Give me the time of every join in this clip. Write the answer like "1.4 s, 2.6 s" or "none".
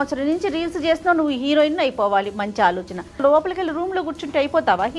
3.2 s